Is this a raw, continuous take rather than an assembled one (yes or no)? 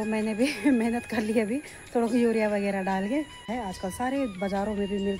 no